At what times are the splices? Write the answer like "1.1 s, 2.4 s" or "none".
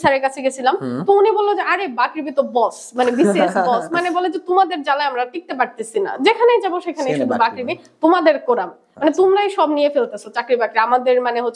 none